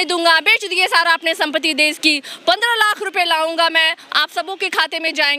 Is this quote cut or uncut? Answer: uncut